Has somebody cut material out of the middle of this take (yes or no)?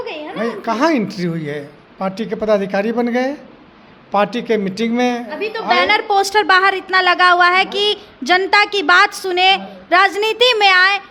no